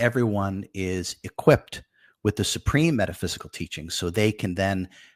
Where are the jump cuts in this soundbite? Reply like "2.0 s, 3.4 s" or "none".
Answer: none